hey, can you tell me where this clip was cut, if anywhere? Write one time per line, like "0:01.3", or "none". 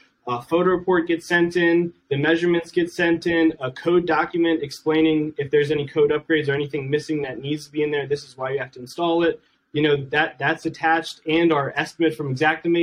none